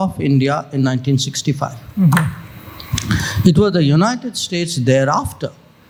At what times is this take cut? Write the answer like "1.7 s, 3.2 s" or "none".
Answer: none